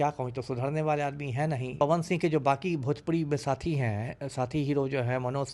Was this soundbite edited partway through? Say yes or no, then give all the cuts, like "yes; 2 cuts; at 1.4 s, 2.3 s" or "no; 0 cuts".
yes; 1 cut; at 1.8 s